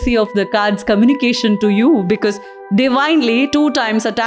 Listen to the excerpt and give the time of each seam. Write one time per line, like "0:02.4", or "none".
none

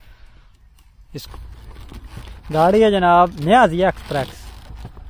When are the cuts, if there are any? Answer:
0:01.3

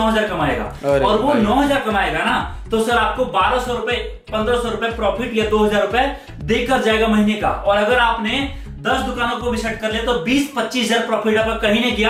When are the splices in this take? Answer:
none

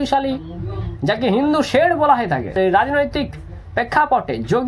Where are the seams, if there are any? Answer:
none

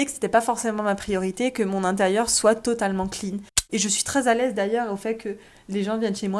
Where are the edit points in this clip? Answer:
0:03.5

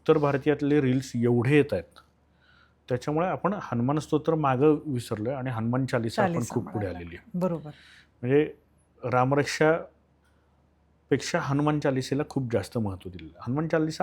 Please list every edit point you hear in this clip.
none

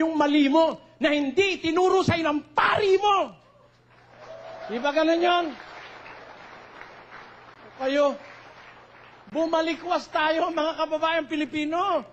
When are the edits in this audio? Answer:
none

